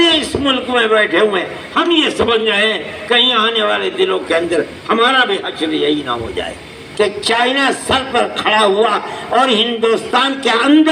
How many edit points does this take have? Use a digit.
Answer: 1